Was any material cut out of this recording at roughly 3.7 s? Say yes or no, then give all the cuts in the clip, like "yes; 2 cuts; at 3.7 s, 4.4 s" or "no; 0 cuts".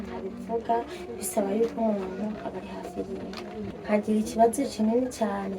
yes; 1 cut; at 3.7 s